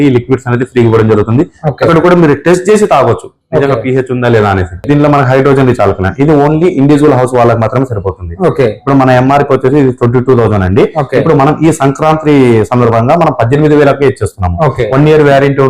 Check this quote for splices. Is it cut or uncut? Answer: cut